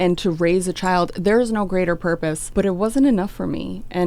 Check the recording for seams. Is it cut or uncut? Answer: cut